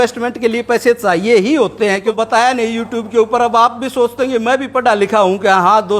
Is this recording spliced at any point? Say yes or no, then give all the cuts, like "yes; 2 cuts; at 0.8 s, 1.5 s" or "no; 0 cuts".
yes; 1 cut; at 2.2 s